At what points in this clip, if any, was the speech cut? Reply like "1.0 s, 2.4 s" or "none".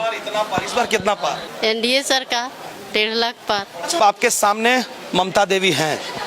1.5 s, 4.0 s